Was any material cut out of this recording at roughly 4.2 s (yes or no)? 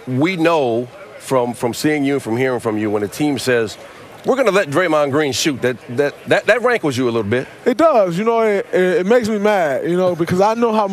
yes